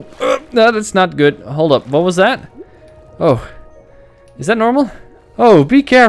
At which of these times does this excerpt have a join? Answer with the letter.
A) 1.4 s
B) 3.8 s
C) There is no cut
C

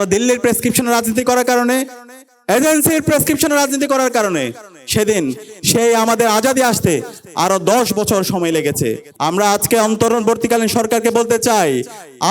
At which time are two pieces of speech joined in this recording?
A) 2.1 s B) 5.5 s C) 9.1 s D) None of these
C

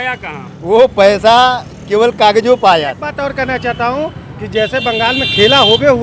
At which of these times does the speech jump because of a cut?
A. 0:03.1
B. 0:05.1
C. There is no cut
A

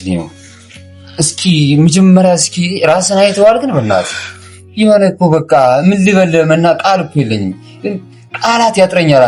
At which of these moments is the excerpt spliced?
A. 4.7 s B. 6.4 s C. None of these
C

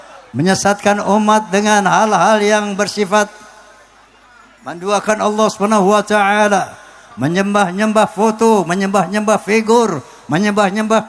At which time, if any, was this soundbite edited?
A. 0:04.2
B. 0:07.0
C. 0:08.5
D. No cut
D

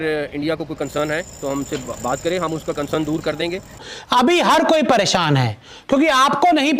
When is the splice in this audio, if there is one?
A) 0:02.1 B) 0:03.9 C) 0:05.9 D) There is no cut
B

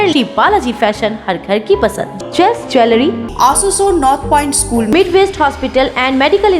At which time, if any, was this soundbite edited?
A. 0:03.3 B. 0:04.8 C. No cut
A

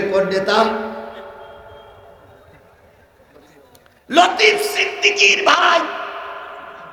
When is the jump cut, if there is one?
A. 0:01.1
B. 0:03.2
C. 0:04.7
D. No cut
D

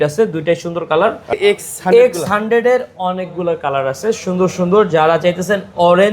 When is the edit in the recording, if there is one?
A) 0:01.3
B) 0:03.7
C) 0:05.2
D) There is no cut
A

